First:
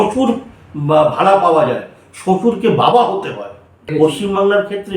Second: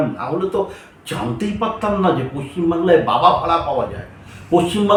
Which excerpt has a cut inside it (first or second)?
first